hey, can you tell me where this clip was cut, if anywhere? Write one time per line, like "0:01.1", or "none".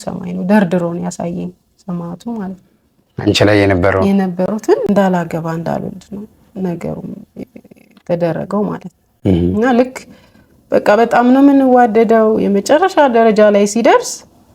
0:04.8